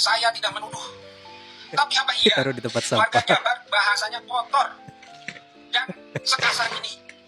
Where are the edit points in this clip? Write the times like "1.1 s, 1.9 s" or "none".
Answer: none